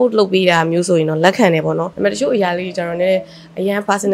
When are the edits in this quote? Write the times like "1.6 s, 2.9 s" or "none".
1.9 s